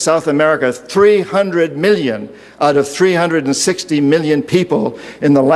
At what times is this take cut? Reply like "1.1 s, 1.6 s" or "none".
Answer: 2.0 s